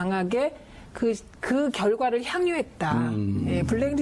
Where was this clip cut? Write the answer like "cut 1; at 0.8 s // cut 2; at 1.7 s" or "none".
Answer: none